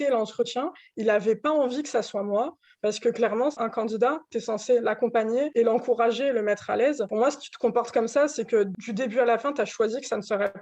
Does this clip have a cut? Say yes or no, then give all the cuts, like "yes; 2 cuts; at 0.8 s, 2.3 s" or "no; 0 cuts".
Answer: yes; 4 cuts; at 3.6 s, 5.5 s, 7.1 s, 8.8 s